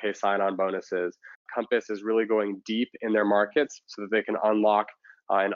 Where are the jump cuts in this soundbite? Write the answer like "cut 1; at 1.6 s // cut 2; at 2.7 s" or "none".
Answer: cut 1; at 1.5 s